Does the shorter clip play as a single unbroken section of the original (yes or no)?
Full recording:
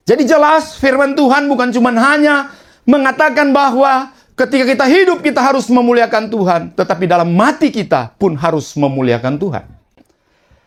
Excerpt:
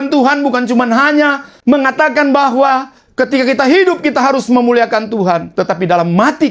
no